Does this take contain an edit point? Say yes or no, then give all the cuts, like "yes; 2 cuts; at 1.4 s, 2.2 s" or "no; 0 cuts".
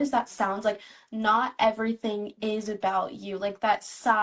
no; 0 cuts